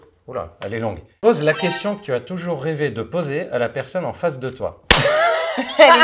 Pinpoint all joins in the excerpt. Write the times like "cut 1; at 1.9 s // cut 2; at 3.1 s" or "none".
none

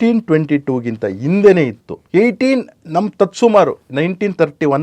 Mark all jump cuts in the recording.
none

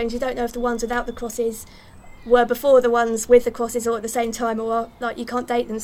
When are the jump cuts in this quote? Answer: none

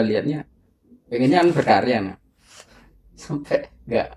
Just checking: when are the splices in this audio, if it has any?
none

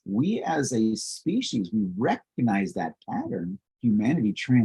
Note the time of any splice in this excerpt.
cut 1; at 3.6 s

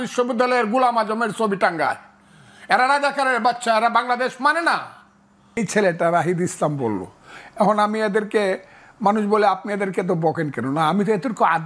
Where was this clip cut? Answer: cut 1; at 5.6 s

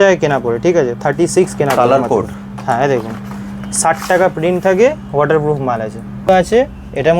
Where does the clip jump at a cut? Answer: cut 1; at 6.3 s

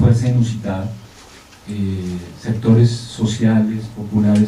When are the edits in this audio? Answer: cut 1; at 3.0 s

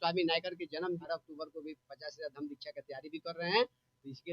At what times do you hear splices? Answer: cut 1; at 1.0 s

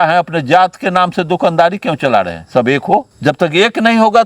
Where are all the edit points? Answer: cut 1; at 3.1 s

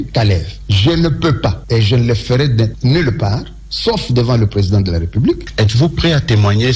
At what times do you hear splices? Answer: cut 1; at 5.5 s

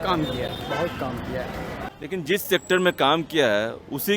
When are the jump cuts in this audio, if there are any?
cut 1; at 1.9 s

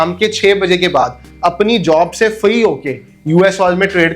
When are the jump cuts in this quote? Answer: none

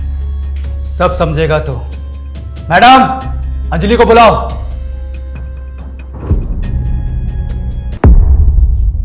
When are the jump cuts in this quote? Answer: cut 1; at 8.0 s

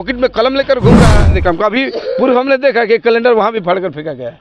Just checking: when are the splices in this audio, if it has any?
cut 1; at 1.2 s

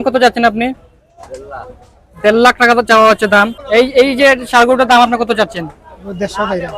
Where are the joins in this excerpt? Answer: cut 1; at 3.6 s

